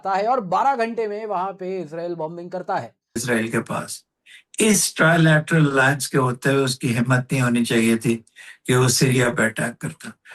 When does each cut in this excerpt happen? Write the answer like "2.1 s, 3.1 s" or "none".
3.2 s